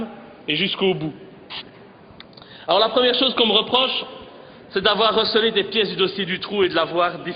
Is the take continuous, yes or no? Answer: yes